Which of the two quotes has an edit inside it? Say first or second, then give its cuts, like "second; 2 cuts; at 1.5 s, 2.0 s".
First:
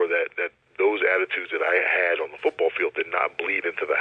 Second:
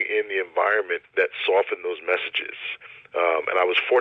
second; 1 cut; at 1.0 s